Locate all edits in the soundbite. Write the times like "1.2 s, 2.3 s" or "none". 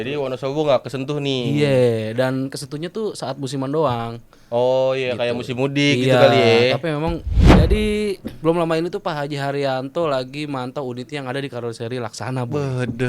7.5 s